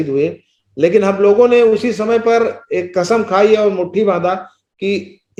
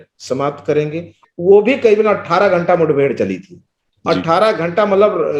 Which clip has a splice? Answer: second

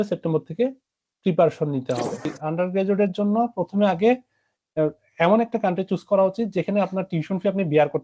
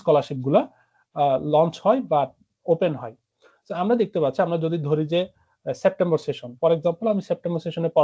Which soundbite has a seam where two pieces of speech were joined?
first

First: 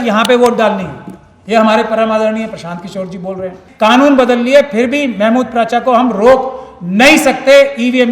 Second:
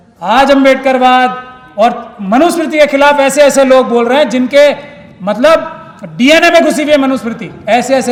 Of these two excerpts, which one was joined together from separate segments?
first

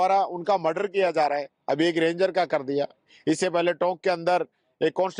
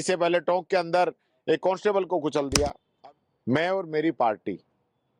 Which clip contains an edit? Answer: second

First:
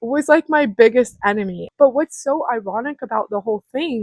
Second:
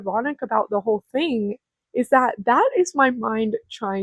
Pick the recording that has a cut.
first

